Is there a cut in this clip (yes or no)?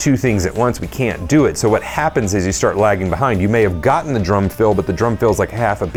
no